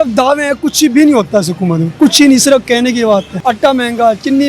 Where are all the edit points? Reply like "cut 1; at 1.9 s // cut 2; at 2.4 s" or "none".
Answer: cut 1; at 3.4 s